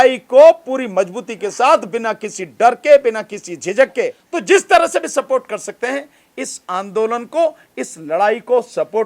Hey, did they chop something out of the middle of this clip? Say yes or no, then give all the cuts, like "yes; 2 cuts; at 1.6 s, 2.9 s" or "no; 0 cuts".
yes; 1 cut; at 4.3 s